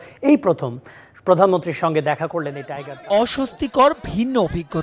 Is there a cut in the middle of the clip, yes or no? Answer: yes